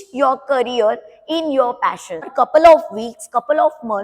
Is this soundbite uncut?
no; 1 cut; at 2.3 s

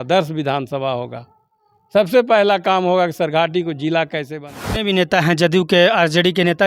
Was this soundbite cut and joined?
yes; 1 cut; at 4.8 s

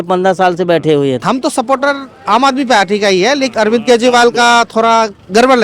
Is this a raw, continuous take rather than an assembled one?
no; 2 cuts; at 1.2 s, 3.5 s

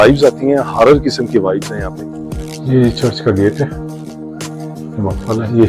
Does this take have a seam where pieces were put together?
no; 0 cuts

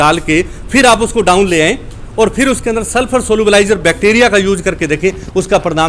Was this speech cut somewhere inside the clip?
no; 0 cuts

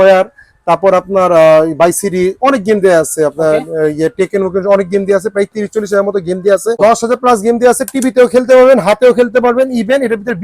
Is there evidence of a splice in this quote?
yes; 1 cut; at 6.8 s

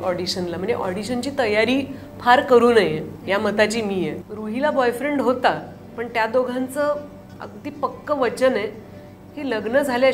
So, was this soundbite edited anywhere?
yes; 1 cut; at 4.3 s

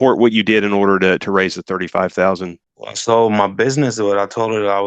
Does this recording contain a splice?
yes; 1 cut; at 3.0 s

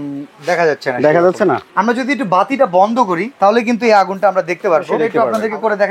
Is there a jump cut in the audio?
yes; 2 cuts; at 1.7 s, 5.0 s

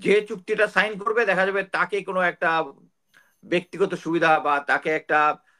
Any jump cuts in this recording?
no; 0 cuts

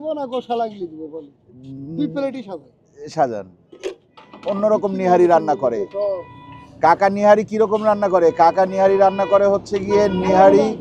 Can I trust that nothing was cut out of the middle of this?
no; 1 cut; at 4.1 s

